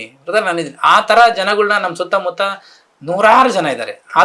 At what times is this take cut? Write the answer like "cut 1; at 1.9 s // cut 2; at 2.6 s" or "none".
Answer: none